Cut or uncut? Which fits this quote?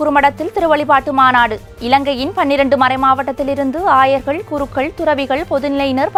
uncut